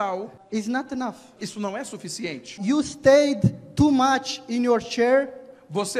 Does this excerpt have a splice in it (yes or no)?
yes